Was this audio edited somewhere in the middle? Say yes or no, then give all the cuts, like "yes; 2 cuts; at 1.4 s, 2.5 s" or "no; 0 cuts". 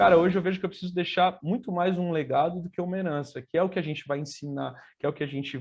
no; 0 cuts